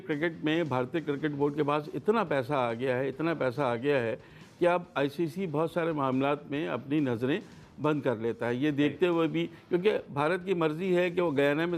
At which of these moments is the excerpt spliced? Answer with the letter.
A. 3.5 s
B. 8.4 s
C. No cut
C